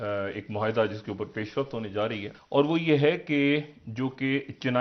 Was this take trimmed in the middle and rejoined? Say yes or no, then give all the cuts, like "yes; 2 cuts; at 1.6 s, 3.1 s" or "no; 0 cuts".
yes; 1 cut; at 2.3 s